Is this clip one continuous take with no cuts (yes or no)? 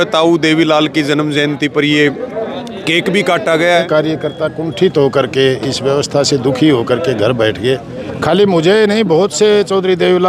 no